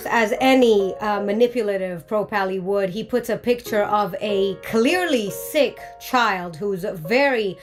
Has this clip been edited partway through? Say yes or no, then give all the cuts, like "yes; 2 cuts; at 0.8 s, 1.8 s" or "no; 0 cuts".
no; 0 cuts